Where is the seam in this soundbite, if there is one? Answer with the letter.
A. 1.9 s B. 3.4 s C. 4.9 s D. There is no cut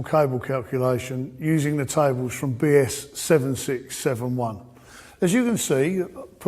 A